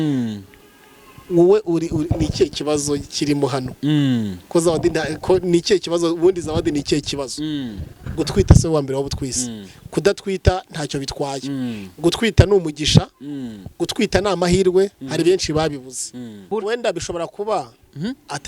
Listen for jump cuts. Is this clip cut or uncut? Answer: cut